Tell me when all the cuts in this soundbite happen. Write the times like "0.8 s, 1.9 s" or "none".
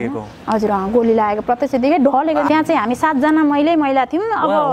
2.5 s